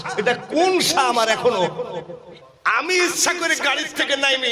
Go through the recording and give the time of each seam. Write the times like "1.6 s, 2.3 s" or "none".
none